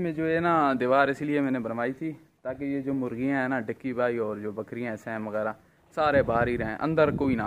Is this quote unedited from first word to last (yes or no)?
yes